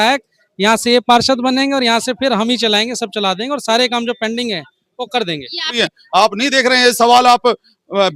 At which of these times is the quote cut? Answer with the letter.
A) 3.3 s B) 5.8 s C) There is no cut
B